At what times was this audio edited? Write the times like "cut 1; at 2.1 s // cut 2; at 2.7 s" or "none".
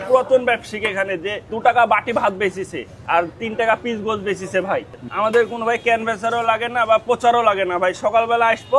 none